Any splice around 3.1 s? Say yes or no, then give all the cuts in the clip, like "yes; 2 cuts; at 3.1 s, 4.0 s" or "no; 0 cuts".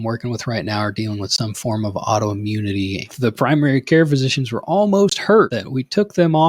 yes; 2 cuts; at 3.1 s, 5.6 s